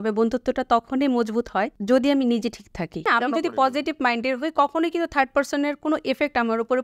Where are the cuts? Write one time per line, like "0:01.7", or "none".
0:01.8
0:03.0